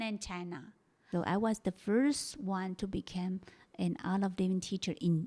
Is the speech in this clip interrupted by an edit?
yes; 1 cut; at 1.0 s

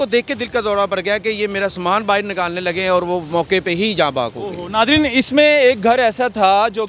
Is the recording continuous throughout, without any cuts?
yes; 0 cuts

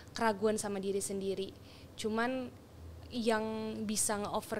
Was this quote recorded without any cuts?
yes; 0 cuts

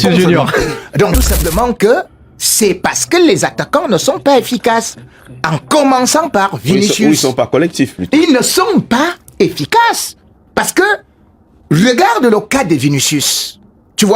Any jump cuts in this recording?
yes; 1 cut; at 1.3 s

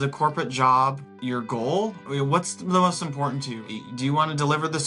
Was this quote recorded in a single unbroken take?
no; 3 cuts; at 1.1 s, 2.0 s, 3.6 s

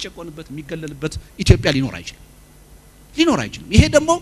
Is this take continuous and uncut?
yes; 0 cuts

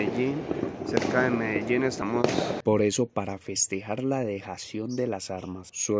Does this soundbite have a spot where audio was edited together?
yes; 1 cut; at 2.0 s

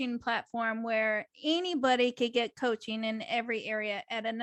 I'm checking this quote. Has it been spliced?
no; 0 cuts

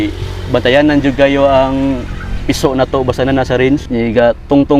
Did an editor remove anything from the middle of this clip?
no; 0 cuts

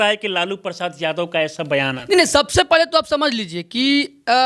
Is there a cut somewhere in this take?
no; 0 cuts

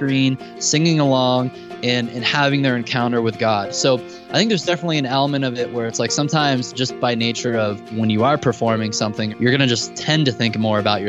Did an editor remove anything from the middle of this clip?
yes; 3 cuts; at 7.9 s, 9.3 s, 10.0 s

